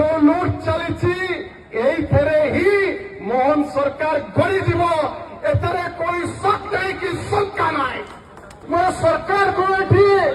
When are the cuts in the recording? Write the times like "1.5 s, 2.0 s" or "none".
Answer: 8.6 s